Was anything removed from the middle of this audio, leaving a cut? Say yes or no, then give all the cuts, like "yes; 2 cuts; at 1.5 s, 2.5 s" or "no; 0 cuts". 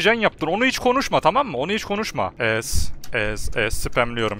yes; 1 cut; at 2.3 s